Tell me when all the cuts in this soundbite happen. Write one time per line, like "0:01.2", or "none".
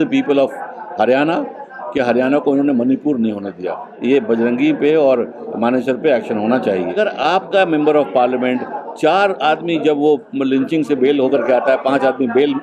0:03.9
0:07.0